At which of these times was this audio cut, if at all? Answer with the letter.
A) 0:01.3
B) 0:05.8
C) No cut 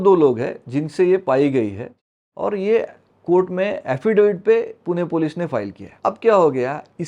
B